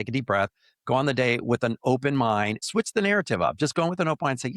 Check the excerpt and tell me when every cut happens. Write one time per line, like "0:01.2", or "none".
0:02.6